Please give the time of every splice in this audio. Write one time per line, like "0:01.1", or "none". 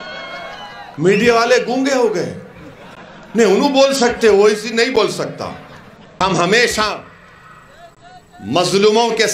0:06.2